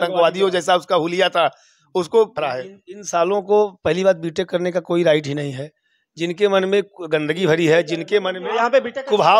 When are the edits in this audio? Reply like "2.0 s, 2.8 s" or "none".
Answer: 2.3 s